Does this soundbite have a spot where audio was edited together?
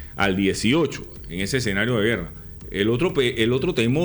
no; 0 cuts

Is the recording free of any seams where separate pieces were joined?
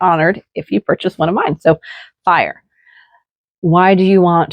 yes; 0 cuts

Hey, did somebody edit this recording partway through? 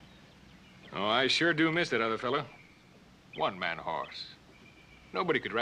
no; 0 cuts

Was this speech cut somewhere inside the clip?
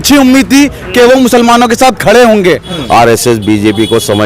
yes; 1 cut; at 2.7 s

